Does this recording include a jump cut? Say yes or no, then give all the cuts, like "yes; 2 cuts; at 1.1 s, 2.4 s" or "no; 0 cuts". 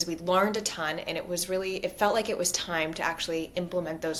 no; 0 cuts